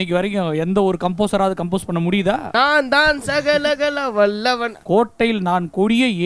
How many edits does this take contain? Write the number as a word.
two